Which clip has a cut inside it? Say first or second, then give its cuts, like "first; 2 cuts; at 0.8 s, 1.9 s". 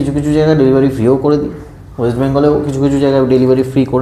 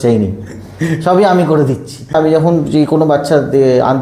second; 1 cut; at 2.1 s